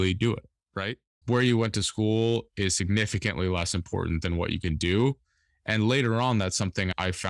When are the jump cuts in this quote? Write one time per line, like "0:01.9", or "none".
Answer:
0:01.2